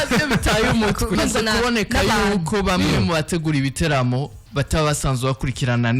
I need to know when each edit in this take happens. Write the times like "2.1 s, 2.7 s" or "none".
1.2 s

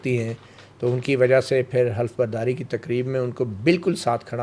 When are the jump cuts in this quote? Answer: none

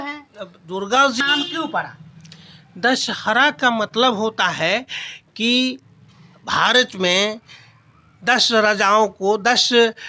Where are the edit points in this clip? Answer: 1.2 s

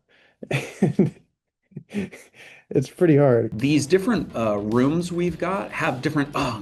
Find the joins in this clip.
3.5 s

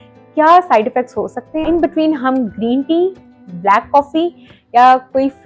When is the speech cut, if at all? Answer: 1.6 s

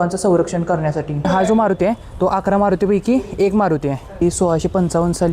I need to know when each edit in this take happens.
1.1 s, 4.2 s

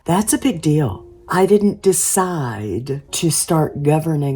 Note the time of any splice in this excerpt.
1.3 s, 3.1 s

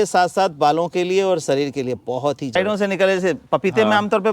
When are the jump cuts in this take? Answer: 2.5 s

